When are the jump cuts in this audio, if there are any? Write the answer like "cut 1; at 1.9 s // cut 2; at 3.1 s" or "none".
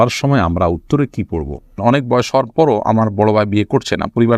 cut 1; at 1.8 s

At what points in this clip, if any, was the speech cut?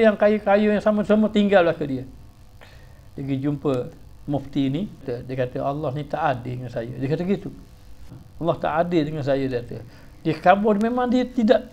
cut 1; at 5.0 s // cut 2; at 8.2 s

